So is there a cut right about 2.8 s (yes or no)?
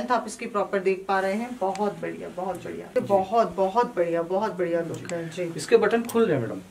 yes